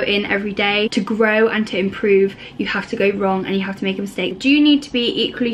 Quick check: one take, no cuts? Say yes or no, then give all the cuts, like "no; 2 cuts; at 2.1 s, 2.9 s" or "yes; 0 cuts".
no; 2 cuts; at 0.9 s, 4.3 s